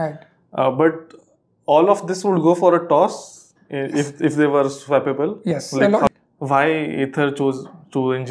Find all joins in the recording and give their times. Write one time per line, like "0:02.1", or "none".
0:06.1